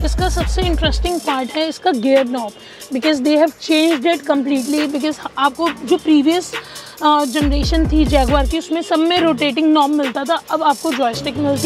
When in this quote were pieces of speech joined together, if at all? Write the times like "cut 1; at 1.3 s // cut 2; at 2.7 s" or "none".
none